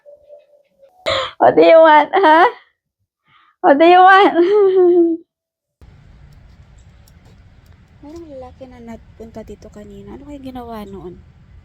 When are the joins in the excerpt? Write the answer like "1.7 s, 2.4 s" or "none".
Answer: 1.1 s, 5.8 s